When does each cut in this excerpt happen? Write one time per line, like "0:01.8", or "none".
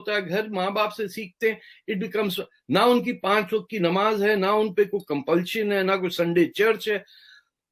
none